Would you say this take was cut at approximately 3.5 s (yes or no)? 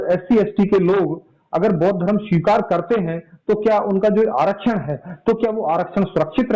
no